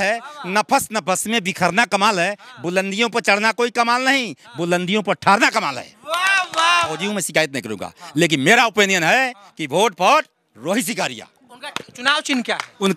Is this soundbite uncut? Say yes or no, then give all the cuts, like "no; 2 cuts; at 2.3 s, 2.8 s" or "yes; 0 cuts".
no; 1 cut; at 7.0 s